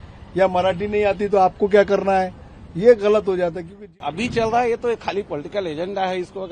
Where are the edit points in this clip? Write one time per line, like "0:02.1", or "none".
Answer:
0:03.9

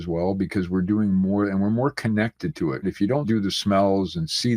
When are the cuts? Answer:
0:03.1

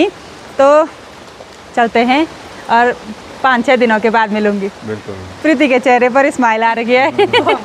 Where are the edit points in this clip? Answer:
none

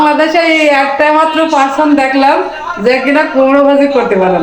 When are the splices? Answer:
none

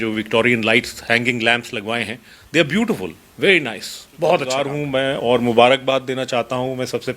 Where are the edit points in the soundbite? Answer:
0:04.7

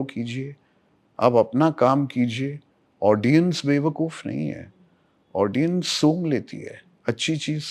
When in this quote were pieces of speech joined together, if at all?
none

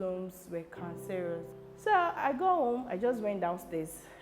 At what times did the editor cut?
0:01.5

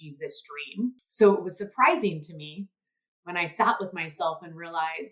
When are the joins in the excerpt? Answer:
0:01.0

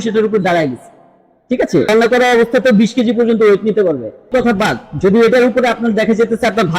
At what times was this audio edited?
0:01.9
0:04.3

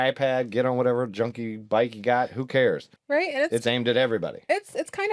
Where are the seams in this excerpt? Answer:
0:02.9

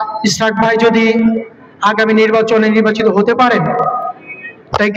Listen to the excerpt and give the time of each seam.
none

